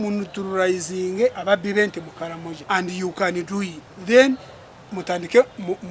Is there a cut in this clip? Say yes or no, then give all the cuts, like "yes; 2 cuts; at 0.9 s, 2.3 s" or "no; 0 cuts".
yes; 3 cuts; at 1.4 s, 2.5 s, 3.9 s